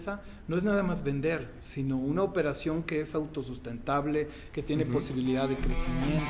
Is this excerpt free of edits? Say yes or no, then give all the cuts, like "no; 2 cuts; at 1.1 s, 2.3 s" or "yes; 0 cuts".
yes; 0 cuts